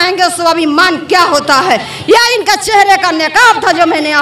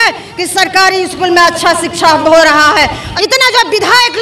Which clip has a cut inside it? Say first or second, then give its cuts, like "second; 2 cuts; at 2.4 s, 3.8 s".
second; 1 cut; at 3.1 s